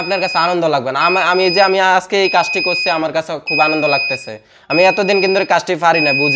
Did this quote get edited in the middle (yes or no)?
no